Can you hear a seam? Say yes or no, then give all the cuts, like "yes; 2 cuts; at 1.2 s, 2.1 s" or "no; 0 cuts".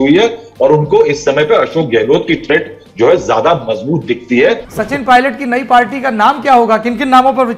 yes; 1 cut; at 4.7 s